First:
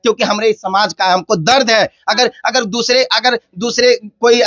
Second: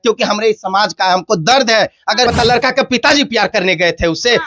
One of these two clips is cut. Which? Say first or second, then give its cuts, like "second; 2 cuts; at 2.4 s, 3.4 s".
second; 1 cut; at 2.3 s